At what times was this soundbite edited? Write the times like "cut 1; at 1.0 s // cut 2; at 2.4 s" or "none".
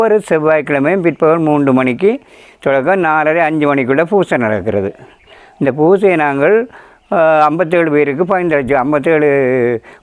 none